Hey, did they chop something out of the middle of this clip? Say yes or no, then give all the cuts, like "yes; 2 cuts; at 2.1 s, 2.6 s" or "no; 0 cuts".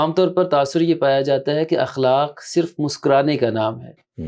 no; 0 cuts